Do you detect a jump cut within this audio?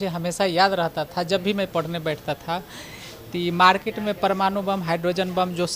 no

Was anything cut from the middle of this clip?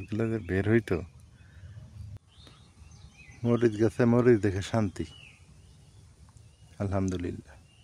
yes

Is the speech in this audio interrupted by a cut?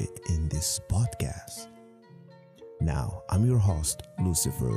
yes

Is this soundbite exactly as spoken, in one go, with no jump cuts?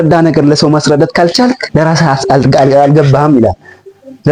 yes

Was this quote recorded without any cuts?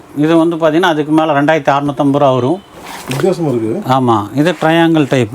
no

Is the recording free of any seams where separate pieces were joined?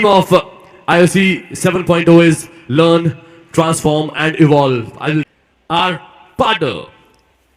no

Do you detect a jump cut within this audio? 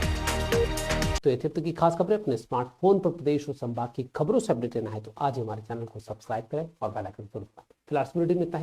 no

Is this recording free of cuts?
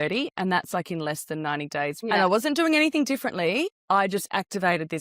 no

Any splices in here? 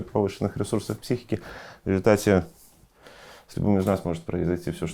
no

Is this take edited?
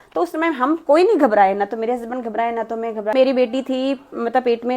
yes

